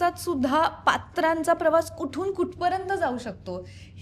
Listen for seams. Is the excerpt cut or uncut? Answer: uncut